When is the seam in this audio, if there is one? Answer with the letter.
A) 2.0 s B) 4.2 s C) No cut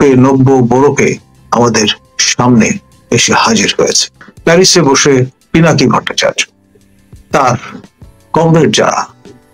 B